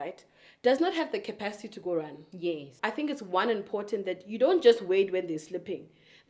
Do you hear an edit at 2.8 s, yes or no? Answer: yes